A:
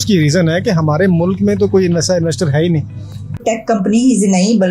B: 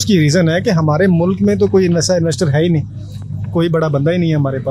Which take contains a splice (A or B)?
A